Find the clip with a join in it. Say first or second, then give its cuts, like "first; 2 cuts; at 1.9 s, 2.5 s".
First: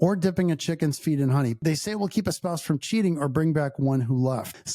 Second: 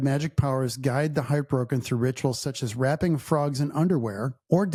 first; 1 cut; at 1.6 s